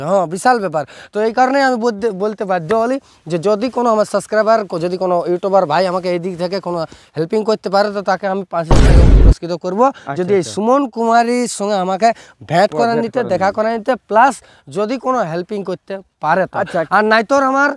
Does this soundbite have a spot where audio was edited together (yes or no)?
no